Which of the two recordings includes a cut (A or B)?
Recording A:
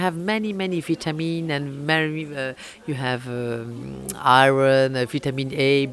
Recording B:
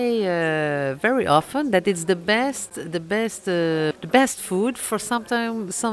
B